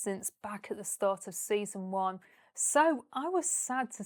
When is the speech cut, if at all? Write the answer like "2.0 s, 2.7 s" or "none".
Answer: none